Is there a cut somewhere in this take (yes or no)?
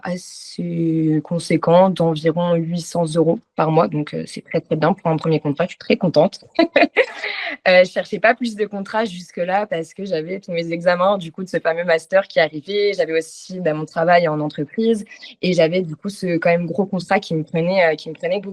no